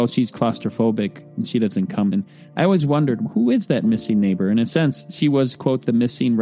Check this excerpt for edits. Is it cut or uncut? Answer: cut